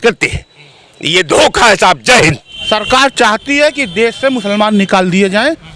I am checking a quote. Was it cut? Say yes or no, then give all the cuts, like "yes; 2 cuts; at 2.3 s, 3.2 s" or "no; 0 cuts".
yes; 1 cut; at 2.5 s